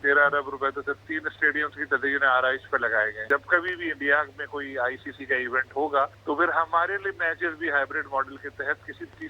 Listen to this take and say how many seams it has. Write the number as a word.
three